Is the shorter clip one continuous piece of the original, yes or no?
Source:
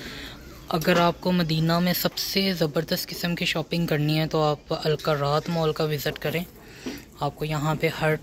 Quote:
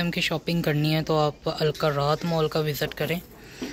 yes